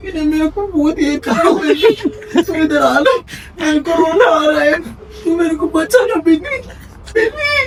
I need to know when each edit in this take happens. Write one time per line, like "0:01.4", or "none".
none